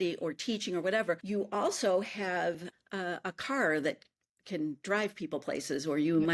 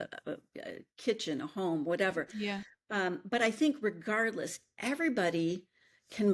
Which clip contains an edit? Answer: first; 2 cuts; at 1.2 s, 2.7 s

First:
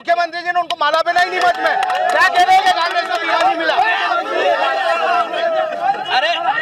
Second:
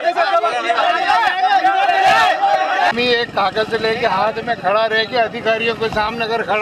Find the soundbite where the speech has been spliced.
second; 1 cut; at 2.9 s

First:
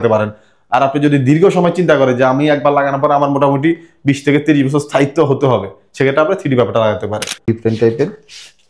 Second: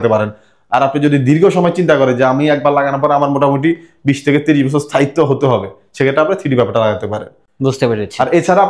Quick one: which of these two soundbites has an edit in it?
first; 1 cut; at 7.4 s

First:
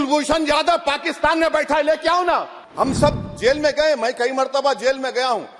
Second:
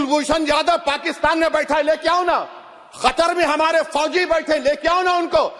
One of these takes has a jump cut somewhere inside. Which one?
first; 1 cut; at 2.6 s

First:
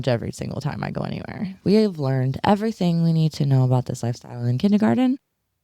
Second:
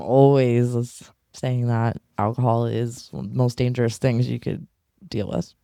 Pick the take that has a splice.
first; 1 cut; at 1.6 s

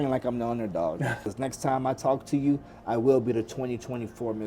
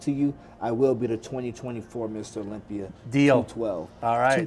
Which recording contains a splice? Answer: first; 1 cut; at 1.2 s

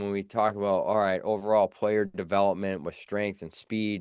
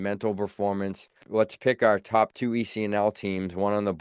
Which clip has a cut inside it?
second; 1 cut; at 1.2 s

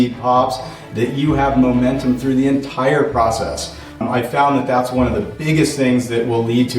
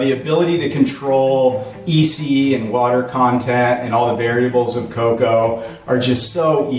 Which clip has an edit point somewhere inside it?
first; 1 cut; at 4.0 s

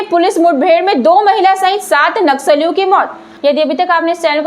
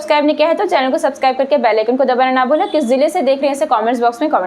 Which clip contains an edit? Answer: first; 1 cut; at 3.3 s

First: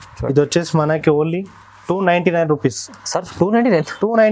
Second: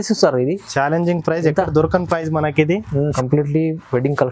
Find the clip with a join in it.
second; 1 cut; at 3.1 s

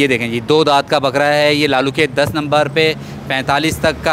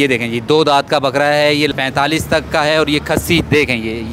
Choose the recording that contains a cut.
second; 1 cut; at 1.7 s

